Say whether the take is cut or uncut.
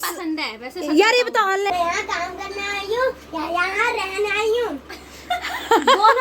cut